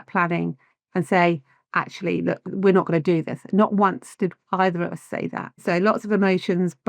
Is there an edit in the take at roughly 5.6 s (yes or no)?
yes